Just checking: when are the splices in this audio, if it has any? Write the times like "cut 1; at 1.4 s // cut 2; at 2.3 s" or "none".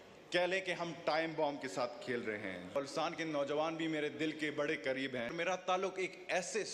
cut 1; at 2.7 s // cut 2; at 5.3 s